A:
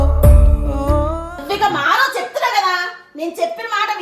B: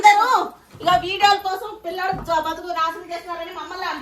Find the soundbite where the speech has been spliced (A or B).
A